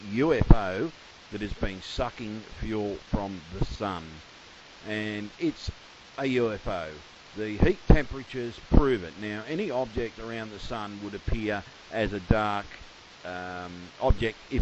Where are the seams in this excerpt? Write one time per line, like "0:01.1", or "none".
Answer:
0:03.4